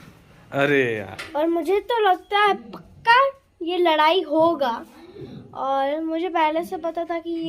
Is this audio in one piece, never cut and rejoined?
no; 1 cut; at 1.1 s

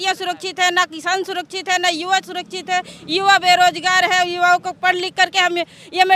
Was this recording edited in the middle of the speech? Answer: no; 0 cuts

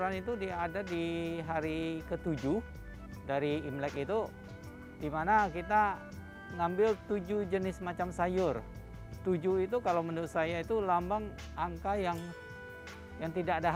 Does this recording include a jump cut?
no; 0 cuts

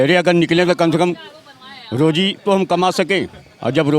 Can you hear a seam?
no; 0 cuts

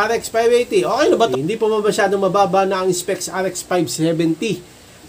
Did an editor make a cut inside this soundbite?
yes; 1 cut; at 1.3 s

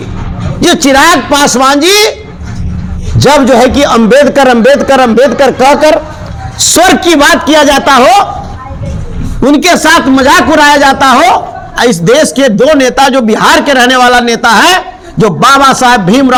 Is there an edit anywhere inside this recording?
no; 0 cuts

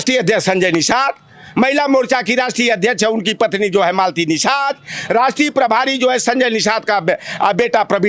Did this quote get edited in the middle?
no; 0 cuts

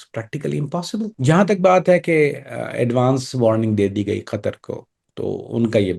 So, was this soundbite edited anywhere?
no; 0 cuts

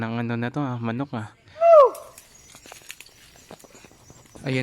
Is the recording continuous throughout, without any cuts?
no; 1 cut; at 1.6 s

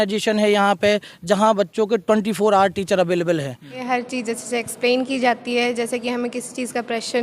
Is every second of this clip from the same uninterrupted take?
no; 1 cut; at 3.8 s

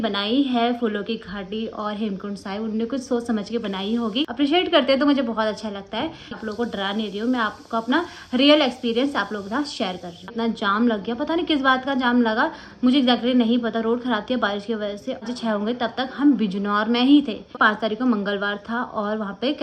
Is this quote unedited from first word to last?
no; 5 cuts; at 4.3 s, 6.4 s, 10.3 s, 15.2 s, 17.6 s

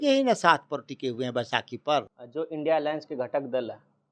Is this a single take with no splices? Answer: no; 1 cut; at 2.1 s

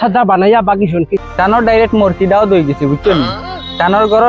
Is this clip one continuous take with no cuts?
no; 1 cut; at 1.2 s

